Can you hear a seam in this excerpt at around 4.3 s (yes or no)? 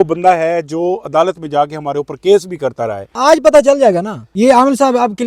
yes